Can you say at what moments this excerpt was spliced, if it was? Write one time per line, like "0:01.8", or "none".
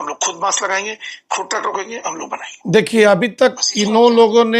0:02.6